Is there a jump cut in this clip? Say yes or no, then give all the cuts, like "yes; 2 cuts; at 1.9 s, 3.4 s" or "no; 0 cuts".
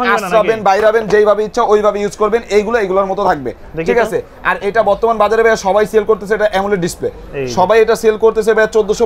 no; 0 cuts